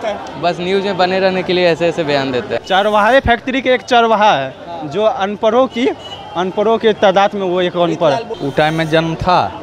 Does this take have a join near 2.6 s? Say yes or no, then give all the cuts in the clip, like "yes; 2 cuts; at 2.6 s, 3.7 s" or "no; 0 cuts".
yes; 2 cuts; at 2.6 s, 8.3 s